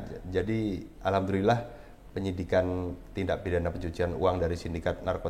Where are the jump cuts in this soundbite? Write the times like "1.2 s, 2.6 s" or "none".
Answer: none

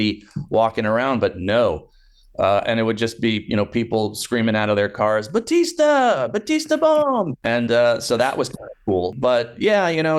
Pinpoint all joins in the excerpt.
7.4 s, 9.1 s

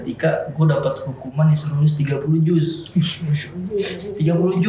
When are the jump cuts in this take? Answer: none

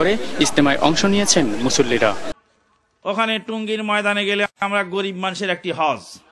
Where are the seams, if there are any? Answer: 2.3 s

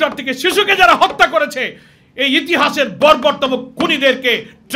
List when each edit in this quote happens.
none

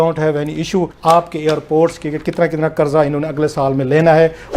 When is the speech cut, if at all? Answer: 0.9 s

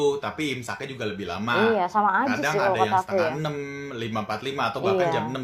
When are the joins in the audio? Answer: none

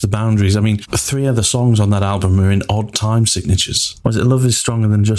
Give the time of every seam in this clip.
0.9 s, 3.9 s

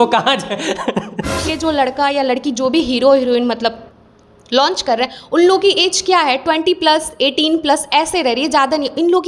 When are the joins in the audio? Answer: 1.4 s

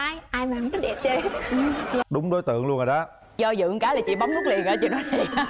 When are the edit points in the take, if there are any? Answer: 2.0 s

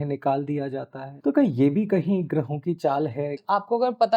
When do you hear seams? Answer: 1.0 s, 3.4 s

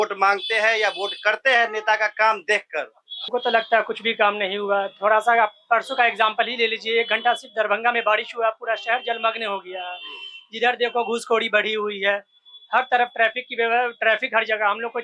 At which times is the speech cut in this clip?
3.3 s

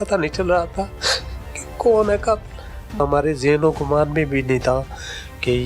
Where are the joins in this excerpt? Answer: 3.0 s

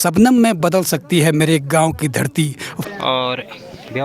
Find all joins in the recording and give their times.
2.8 s

